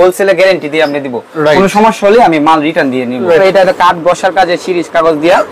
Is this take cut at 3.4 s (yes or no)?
yes